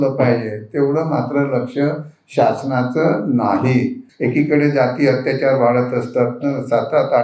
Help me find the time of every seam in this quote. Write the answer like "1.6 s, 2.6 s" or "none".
4.1 s